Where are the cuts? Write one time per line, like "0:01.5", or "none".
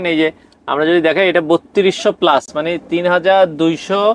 none

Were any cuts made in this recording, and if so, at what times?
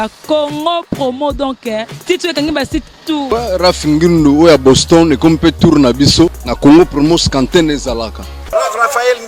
0:03.3
0:06.4
0:08.4

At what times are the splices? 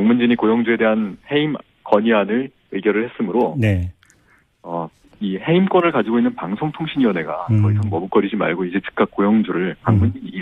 none

